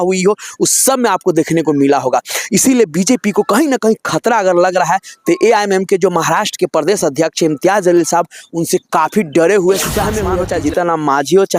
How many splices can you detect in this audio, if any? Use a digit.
1